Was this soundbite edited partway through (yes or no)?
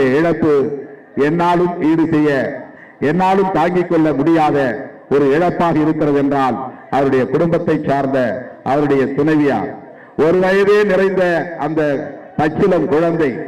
no